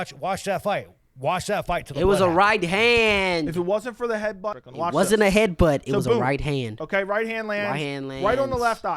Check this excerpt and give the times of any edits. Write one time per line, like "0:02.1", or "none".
0:04.5